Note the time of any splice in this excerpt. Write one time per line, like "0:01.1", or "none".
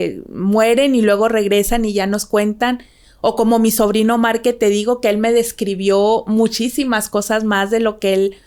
none